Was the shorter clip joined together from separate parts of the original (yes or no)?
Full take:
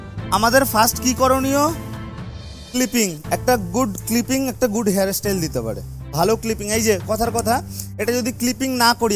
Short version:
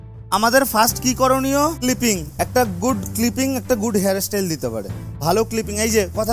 yes